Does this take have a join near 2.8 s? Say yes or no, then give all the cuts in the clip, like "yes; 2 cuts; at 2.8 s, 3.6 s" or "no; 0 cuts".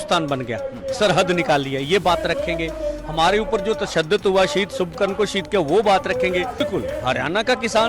no; 1 cut; at 6.6 s